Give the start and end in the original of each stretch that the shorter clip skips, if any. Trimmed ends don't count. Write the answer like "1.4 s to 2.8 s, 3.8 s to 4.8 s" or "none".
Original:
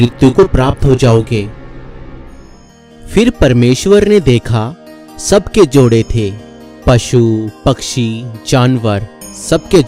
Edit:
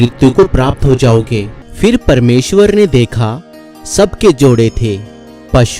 1.6 s to 2.9 s